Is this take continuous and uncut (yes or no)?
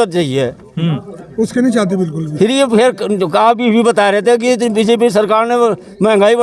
yes